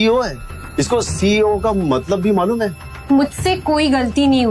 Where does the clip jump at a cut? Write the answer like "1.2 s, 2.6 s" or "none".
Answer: 2.9 s